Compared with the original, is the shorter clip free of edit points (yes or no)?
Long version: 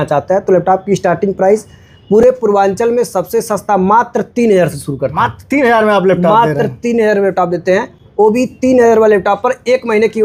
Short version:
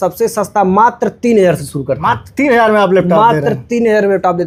yes